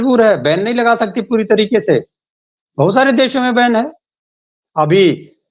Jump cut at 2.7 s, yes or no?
no